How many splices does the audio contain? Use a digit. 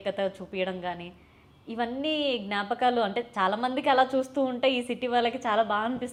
0